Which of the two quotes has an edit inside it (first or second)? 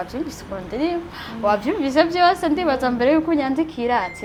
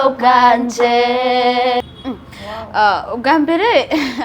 second